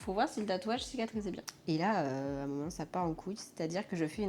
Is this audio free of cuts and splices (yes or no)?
no